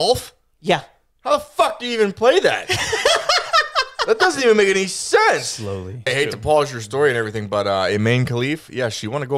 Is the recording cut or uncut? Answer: cut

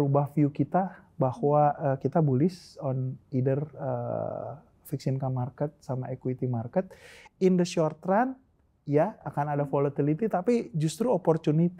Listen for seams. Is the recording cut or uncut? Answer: uncut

